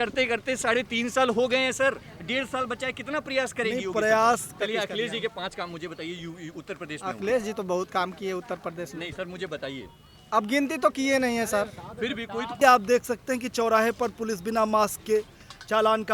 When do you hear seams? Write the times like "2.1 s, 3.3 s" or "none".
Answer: 4.5 s, 12.6 s